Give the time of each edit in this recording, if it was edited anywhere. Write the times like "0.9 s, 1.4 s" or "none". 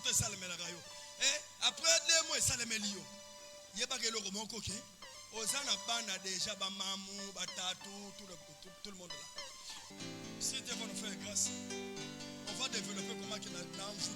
9.9 s